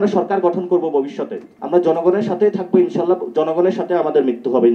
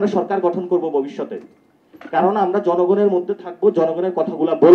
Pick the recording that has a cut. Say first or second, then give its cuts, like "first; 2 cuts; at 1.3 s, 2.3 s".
first; 1 cut; at 1.5 s